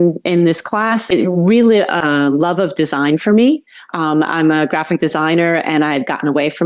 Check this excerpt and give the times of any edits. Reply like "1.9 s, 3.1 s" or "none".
1.1 s, 2.0 s